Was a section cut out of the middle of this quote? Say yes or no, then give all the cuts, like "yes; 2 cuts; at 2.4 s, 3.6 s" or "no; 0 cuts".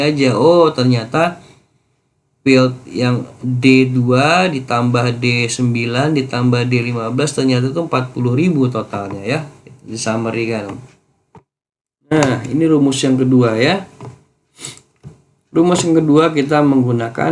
yes; 1 cut; at 11.9 s